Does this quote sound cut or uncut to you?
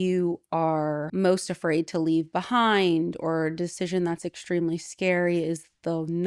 cut